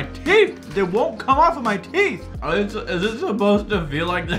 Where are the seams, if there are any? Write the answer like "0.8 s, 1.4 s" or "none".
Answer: none